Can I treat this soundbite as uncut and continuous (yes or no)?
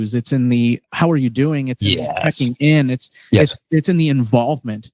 yes